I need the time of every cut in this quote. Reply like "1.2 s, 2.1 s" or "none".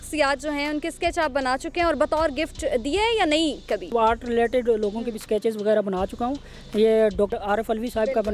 3.9 s